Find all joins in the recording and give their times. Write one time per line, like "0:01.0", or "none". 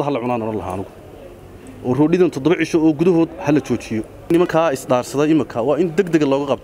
0:04.5